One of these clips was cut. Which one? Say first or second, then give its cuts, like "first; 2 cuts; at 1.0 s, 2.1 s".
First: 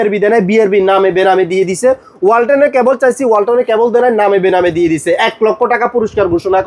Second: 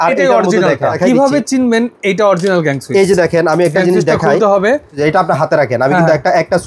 second; 2 cuts; at 1.0 s, 4.9 s